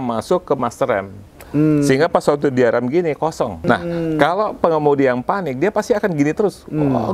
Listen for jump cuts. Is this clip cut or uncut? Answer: cut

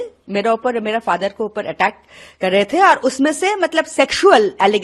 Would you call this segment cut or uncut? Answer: uncut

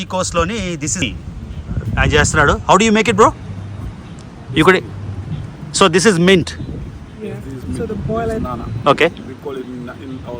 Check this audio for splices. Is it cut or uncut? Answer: cut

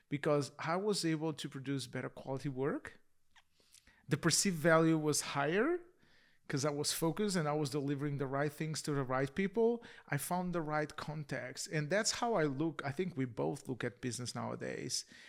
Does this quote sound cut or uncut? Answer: uncut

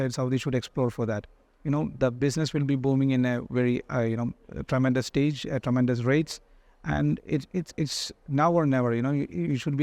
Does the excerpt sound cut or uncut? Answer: uncut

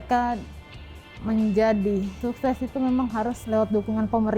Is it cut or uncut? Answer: cut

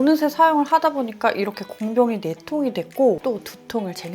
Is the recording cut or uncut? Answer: uncut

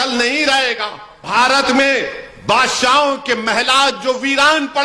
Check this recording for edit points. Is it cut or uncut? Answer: cut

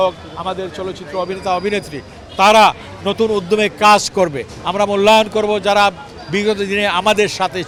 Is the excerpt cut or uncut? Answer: uncut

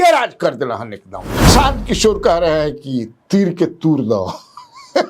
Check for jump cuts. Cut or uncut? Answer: cut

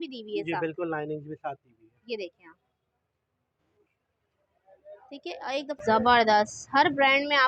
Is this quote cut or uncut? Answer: cut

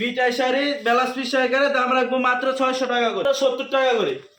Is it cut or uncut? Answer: cut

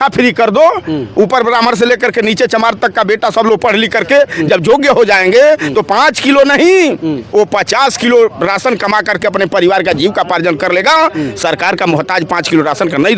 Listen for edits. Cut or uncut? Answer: uncut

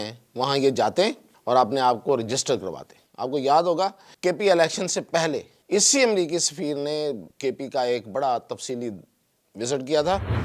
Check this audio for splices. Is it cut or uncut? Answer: cut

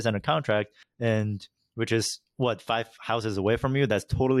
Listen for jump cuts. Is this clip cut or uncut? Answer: uncut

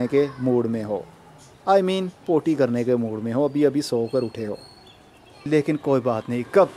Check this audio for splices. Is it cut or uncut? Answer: cut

